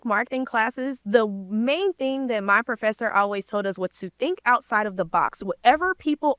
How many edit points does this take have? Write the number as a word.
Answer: one